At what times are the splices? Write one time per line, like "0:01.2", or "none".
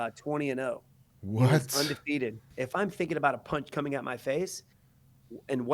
0:02.5